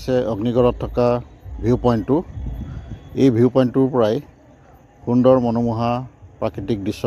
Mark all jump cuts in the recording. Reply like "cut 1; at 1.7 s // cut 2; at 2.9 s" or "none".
none